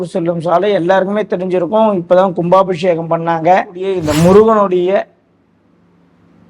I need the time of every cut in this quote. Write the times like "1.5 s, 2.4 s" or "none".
3.9 s